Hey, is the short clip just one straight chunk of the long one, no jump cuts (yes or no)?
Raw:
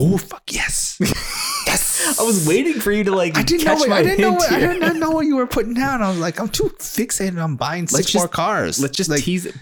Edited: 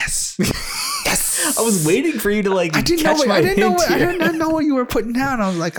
yes